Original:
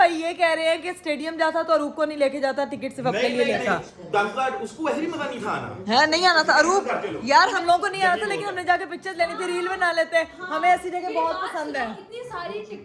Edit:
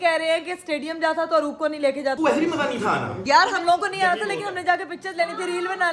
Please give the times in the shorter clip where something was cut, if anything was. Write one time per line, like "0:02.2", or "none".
0:02.2
0:03.1